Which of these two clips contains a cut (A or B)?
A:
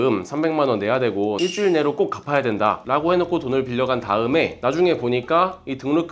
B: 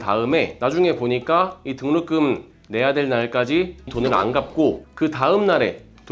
A